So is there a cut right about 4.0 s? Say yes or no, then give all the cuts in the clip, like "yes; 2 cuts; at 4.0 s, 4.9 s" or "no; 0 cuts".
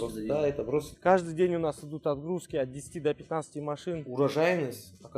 yes; 2 cuts; at 0.9 s, 4.0 s